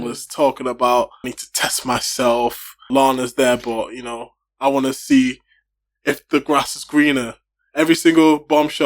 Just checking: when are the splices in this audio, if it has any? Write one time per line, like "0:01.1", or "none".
0:01.4
0:02.8